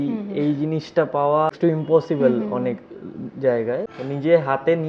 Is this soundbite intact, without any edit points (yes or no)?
no